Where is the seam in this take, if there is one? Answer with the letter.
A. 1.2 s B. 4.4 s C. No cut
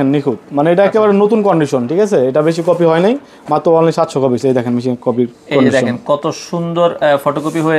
C